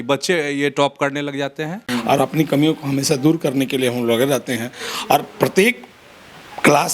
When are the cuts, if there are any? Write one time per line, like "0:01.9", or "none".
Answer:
0:01.8

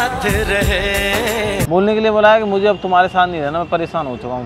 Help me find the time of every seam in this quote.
0:01.7

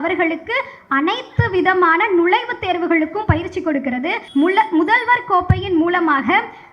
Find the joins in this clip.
0:04.2

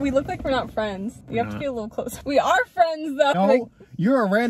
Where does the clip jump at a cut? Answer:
0:01.2
0:02.2
0:03.3

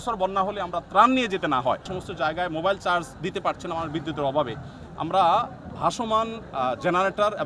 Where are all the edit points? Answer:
0:01.9

